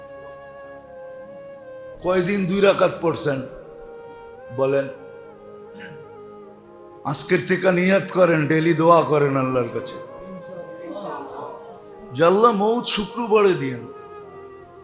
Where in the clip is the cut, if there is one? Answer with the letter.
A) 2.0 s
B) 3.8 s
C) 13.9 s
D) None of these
C